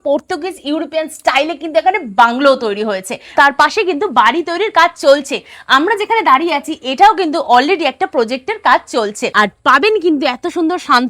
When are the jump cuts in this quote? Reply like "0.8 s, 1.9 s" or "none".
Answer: 3.3 s, 9.2 s